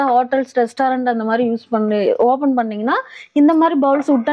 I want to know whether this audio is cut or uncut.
uncut